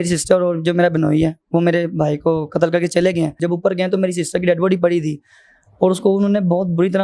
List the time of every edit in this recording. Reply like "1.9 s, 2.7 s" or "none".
3.4 s